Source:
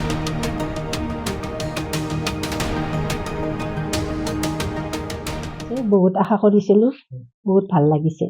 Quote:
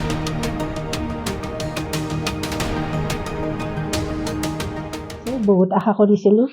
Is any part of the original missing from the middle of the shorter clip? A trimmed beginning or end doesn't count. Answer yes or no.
yes